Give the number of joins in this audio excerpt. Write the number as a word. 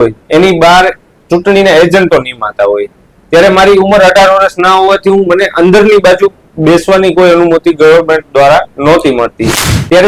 zero